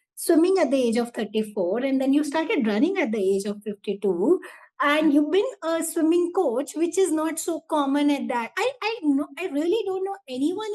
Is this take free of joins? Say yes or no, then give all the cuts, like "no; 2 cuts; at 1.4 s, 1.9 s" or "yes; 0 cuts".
yes; 0 cuts